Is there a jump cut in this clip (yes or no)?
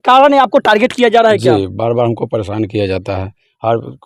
no